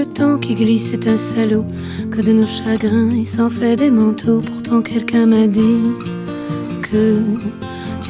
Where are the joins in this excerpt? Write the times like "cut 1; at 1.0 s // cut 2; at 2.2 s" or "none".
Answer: none